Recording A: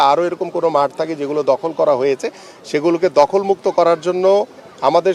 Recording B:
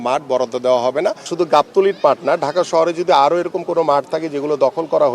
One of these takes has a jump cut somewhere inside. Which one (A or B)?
B